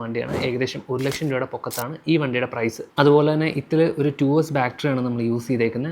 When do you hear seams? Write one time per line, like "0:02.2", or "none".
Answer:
0:02.8